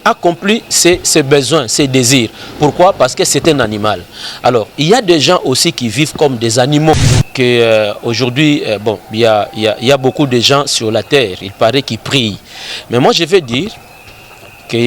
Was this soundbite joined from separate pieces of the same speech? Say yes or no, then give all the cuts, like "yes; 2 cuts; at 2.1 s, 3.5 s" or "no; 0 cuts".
yes; 1 cut; at 7.2 s